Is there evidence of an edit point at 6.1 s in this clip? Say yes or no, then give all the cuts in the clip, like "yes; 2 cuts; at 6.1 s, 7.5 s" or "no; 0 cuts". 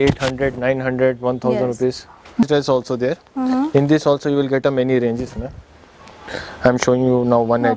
no; 1 cut; at 2.4 s